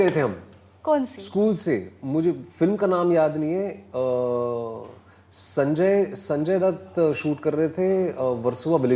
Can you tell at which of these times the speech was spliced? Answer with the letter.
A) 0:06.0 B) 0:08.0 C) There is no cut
C